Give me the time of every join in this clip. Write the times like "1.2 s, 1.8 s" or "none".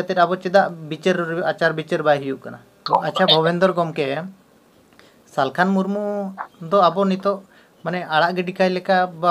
2.8 s